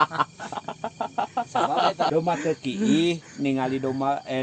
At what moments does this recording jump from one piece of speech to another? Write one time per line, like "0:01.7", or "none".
0:02.1